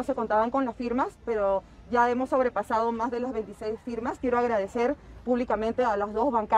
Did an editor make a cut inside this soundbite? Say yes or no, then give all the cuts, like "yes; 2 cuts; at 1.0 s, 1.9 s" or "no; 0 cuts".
no; 0 cuts